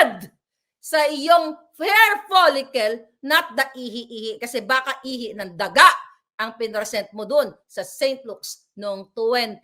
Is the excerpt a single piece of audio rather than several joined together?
yes; 0 cuts

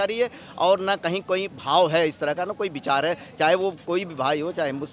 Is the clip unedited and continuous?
yes; 0 cuts

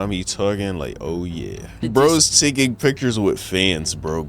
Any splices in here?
yes; 1 cut; at 1.8 s

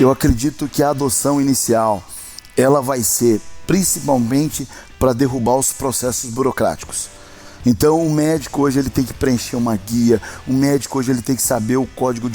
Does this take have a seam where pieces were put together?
no; 0 cuts

